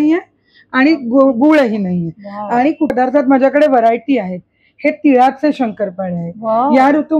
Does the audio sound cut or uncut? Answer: cut